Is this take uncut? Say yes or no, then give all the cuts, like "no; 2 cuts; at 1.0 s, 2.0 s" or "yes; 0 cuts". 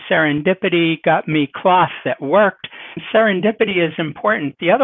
no; 1 cut; at 3.0 s